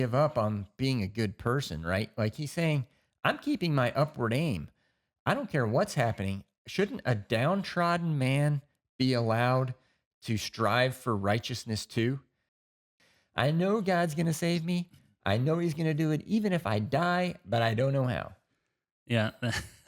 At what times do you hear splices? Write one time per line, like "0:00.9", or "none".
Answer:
0:12.7